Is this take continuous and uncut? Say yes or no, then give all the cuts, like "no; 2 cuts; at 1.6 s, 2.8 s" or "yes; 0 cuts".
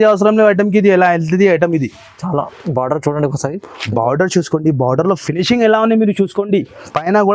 yes; 0 cuts